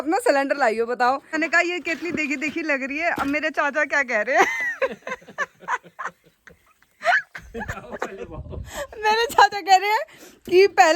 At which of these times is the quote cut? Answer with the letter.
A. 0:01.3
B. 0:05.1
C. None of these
A